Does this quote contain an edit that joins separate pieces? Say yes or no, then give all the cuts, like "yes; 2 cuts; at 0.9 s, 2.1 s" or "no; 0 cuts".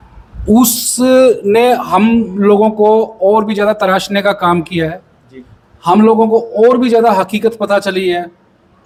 no; 0 cuts